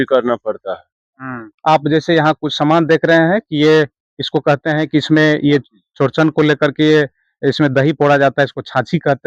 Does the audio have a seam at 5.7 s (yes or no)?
no